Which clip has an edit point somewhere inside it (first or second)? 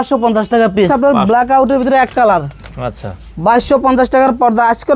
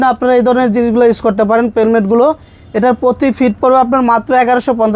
first